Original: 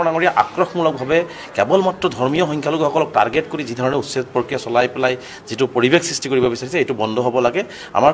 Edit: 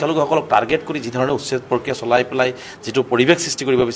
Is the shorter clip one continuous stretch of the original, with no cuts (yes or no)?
yes